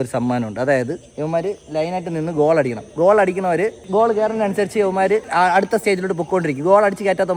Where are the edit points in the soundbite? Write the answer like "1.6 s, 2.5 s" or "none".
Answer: none